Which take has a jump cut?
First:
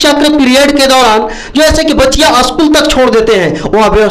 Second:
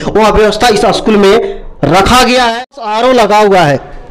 second; 1 cut; at 2.9 s

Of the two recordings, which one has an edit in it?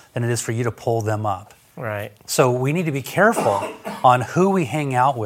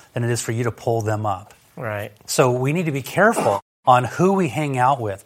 second; 1 cut; at 3.7 s

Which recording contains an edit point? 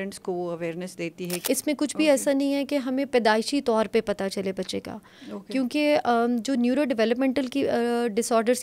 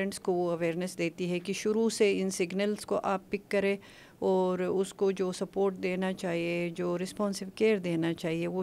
first; 1 cut; at 1.3 s

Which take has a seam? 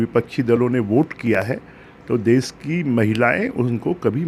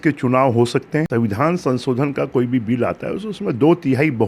second; 1 cut; at 1.1 s

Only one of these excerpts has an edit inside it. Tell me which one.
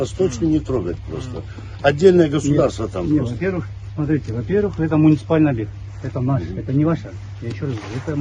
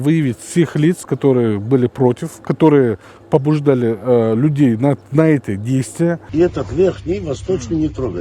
second; 1 cut; at 6.2 s

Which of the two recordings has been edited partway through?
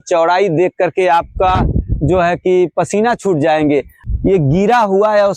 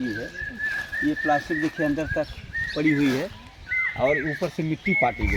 first; 1 cut; at 3.9 s

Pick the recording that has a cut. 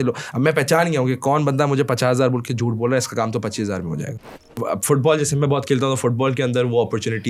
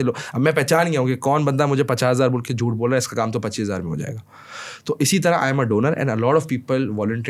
first; 1 cut; at 4.6 s

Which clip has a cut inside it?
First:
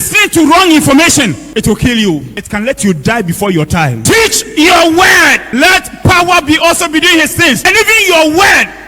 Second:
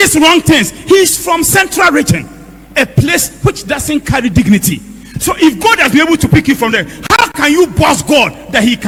first; 5 cuts; at 1.4 s, 2.4 s, 4.0 s, 5.5 s, 7.6 s

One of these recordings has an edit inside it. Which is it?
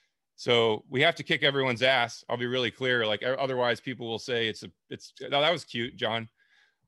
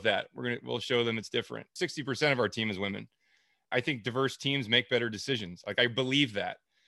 second; 2 cuts; at 1.7 s, 3.7 s

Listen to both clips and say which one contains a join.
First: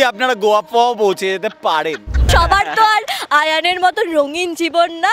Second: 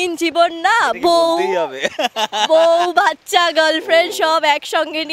first; 1 cut; at 2.3 s

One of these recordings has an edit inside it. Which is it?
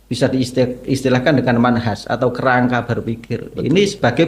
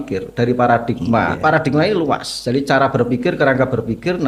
second; 1 cut; at 1.3 s

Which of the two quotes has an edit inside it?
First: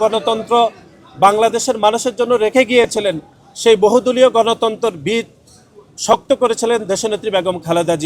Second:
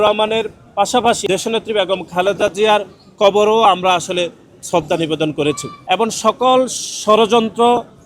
second; 2 cuts; at 1.2 s, 5.7 s

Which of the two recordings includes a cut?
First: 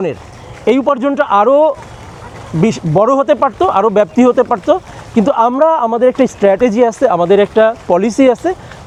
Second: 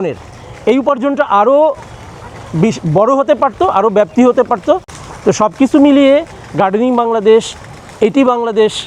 second; 1 cut; at 4.9 s

